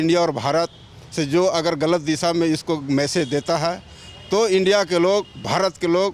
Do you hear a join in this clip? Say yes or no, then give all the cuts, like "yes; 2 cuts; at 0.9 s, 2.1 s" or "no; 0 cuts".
no; 0 cuts